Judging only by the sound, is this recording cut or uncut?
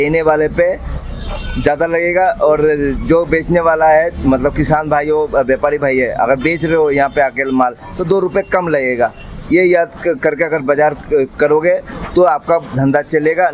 uncut